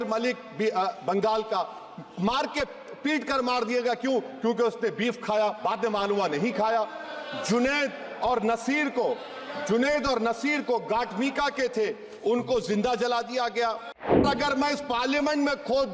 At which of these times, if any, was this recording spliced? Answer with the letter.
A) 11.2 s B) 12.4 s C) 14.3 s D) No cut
C